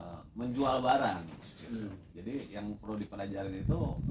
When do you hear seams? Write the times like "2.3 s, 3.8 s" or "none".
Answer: 2.3 s